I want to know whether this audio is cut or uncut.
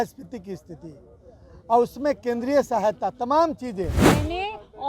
cut